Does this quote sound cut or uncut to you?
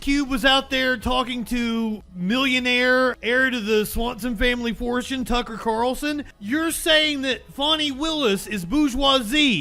cut